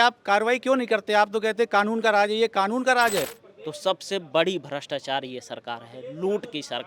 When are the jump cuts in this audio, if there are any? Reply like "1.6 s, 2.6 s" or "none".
3.4 s